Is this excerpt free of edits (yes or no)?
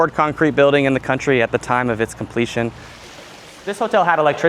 no